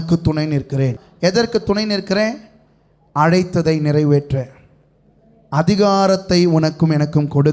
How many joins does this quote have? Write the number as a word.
one